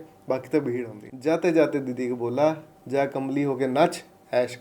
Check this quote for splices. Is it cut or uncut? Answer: cut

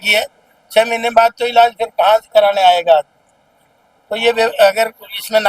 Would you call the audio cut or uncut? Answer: uncut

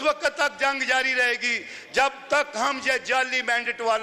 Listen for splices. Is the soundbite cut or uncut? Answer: uncut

